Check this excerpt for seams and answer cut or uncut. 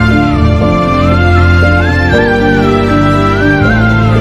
uncut